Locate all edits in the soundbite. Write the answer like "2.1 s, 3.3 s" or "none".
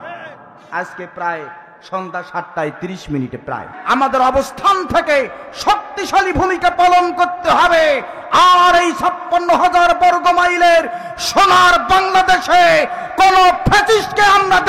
3.7 s

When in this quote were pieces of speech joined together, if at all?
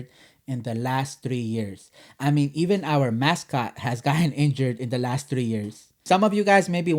5.9 s

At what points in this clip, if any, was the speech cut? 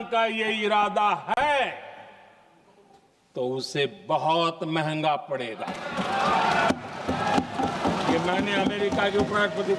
none

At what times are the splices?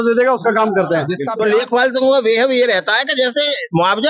1.2 s

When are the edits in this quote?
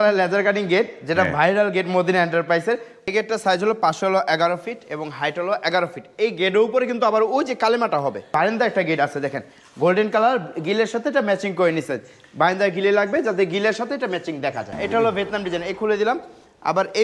3.1 s, 8.3 s, 14.7 s

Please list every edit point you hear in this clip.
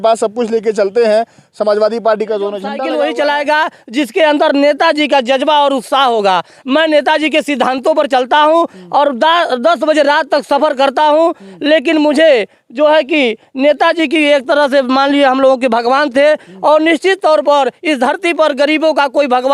2.7 s

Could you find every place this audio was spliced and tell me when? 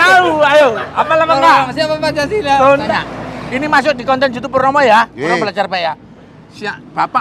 2.9 s

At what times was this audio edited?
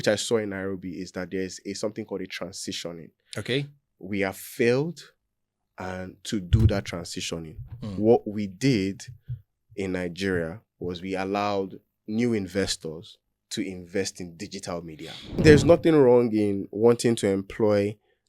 15.4 s

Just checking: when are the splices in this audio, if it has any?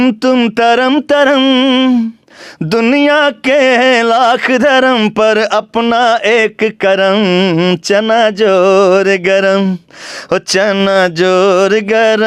none

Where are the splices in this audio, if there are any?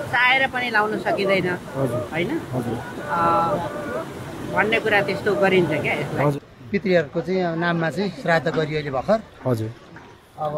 6.3 s

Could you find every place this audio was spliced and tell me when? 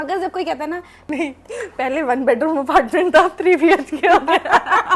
1.1 s

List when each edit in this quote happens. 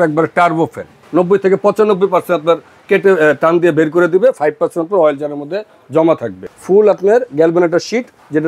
1.0 s, 6.5 s

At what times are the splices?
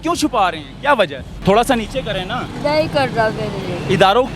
1.3 s

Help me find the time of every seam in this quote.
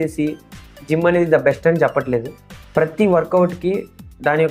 none

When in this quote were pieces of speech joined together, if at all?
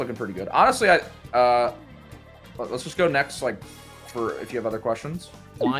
none

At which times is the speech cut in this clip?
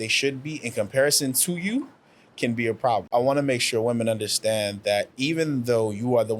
3.1 s

